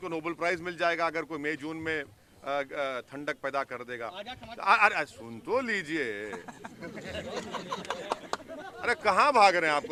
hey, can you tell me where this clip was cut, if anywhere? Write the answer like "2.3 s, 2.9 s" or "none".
none